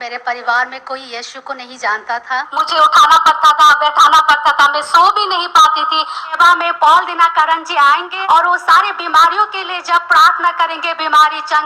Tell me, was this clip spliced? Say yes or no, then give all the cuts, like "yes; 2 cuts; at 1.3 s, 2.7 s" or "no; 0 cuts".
yes; 3 cuts; at 2.6 s, 6.2 s, 8.1 s